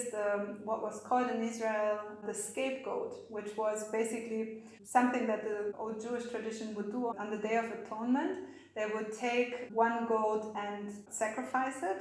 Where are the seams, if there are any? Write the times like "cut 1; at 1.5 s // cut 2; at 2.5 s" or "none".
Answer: cut 1; at 2.2 s // cut 2; at 5.8 s // cut 3; at 7.1 s // cut 4; at 9.7 s // cut 5; at 11.0 s